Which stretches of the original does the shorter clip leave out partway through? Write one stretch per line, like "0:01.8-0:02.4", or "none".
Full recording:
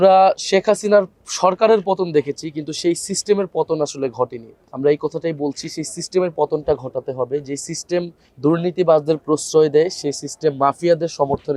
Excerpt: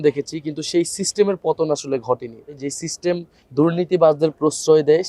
0:04.7-0:07.5